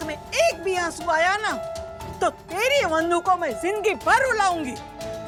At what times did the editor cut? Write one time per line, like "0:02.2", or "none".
none